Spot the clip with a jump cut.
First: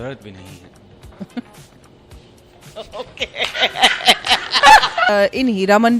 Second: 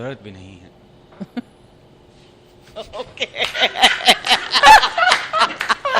first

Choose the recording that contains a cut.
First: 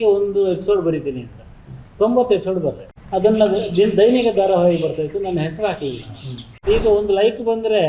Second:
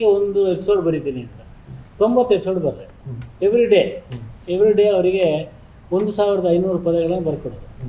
first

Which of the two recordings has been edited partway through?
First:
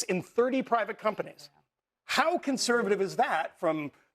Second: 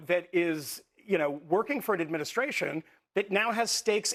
first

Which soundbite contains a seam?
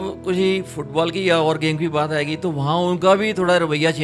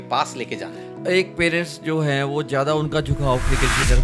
second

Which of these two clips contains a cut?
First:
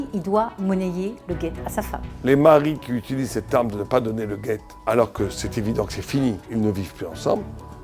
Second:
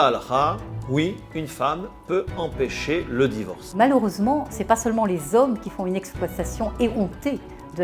first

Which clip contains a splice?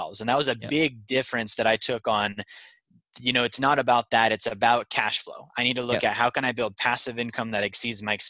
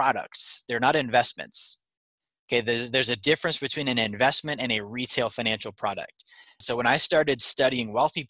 second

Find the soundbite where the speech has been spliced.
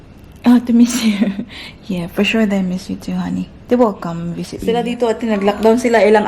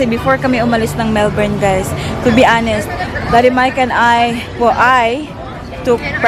first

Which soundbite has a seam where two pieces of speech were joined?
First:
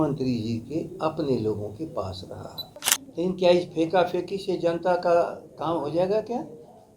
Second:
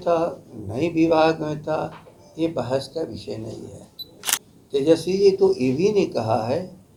first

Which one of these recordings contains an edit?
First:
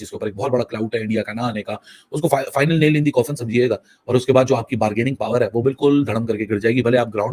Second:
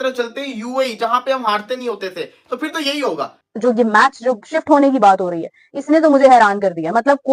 second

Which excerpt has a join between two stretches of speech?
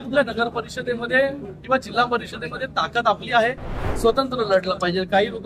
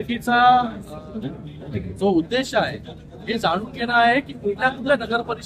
first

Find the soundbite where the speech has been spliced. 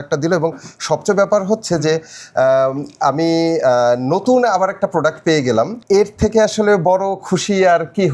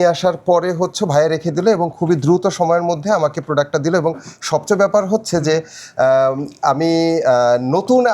first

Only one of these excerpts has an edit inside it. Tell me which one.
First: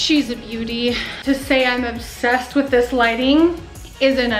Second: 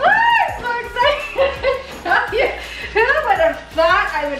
first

